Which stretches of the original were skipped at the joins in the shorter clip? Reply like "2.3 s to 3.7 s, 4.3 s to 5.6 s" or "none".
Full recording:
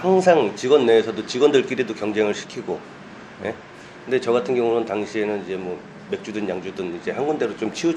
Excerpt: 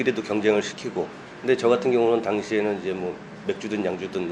3.0 s to 3.9 s